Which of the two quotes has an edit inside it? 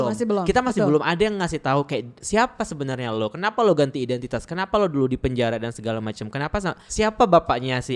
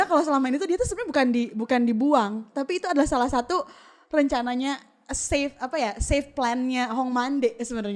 first; 2 cuts; at 2.1 s, 6.8 s

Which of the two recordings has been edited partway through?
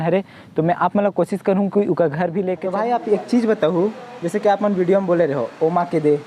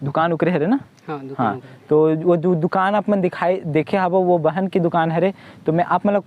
first; 1 cut; at 2.6 s

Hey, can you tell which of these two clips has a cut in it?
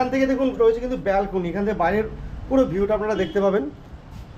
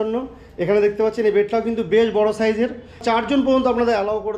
second; 1 cut; at 3.0 s

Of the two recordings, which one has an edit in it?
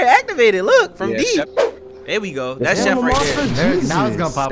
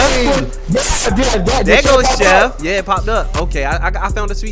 first; 1 cut; at 1.6 s

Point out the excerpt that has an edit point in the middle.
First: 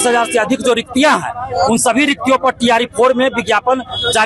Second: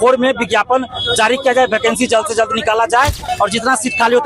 second; 1 cut; at 3.2 s

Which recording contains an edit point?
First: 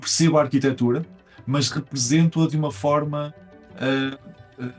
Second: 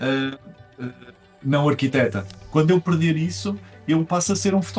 second; 1 cut; at 2.4 s

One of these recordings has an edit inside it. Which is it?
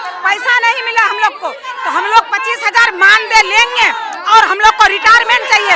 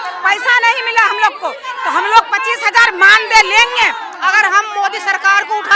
second; 1 cut; at 4.1 s

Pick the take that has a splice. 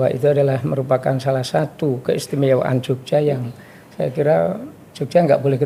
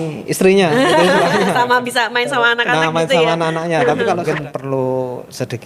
second; 1 cut; at 4.2 s

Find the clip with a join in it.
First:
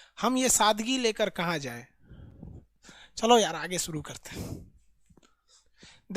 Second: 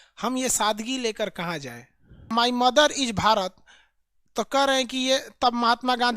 second; 1 cut; at 2.3 s

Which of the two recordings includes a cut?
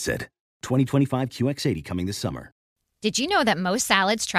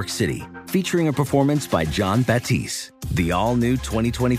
first; 1 cut; at 2.7 s

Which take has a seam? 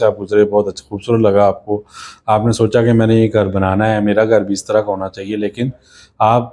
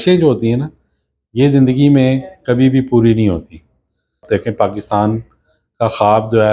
second; 1 cut; at 4.2 s

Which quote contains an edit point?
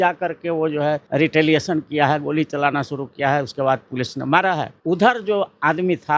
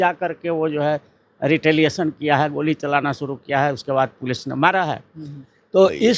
first; 2 cuts; at 1.0 s, 4.7 s

